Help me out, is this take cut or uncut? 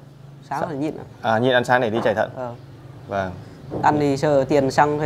uncut